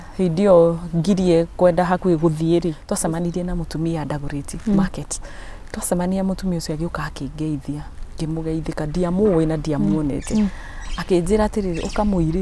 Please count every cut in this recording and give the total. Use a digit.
1